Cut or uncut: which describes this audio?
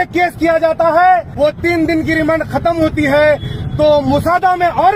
cut